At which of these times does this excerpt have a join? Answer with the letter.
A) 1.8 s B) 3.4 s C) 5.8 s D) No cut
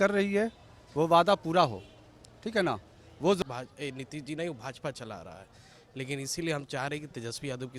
B